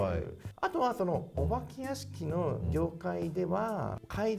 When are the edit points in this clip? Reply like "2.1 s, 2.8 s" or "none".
none